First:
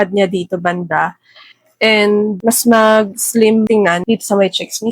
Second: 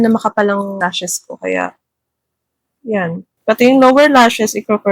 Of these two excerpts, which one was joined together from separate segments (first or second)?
first